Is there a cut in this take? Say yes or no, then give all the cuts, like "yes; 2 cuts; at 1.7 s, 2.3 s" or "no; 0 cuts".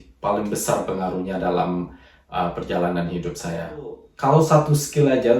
yes; 1 cut; at 4.0 s